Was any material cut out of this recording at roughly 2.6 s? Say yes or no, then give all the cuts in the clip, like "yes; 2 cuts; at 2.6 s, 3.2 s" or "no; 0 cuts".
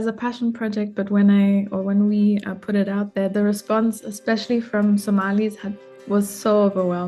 no; 0 cuts